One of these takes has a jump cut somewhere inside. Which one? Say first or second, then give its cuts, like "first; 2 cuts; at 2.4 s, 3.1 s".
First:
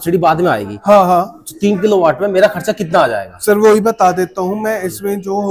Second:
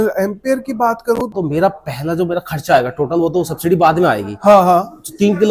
second; 1 cut; at 1.3 s